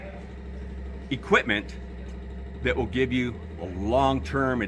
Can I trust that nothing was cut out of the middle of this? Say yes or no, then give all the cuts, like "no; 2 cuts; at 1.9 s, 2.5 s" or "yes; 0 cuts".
yes; 0 cuts